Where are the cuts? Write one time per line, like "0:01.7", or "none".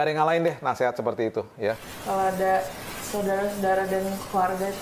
0:01.9